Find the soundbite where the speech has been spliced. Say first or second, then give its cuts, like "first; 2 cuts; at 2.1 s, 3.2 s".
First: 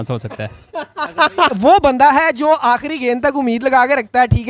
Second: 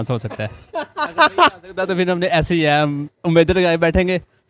first; 1 cut; at 1.5 s